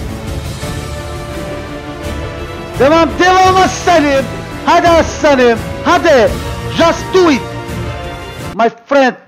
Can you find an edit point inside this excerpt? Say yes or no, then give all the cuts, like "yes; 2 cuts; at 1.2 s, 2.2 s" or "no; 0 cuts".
no; 0 cuts